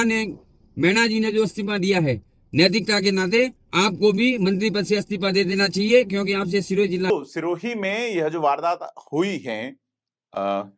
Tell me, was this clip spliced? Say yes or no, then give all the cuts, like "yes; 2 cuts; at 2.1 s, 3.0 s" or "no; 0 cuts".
no; 0 cuts